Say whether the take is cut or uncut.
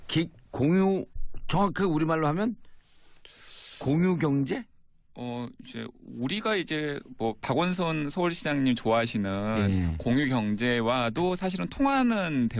uncut